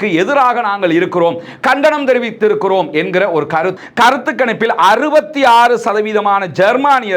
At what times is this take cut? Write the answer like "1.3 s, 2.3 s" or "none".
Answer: 3.8 s